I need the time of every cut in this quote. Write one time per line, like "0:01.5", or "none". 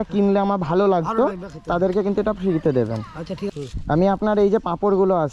0:03.4